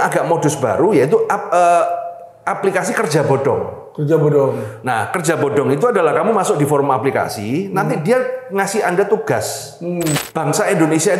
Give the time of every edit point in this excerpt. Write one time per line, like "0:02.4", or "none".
0:10.2